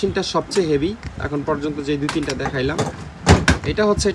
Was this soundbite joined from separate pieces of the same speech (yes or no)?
no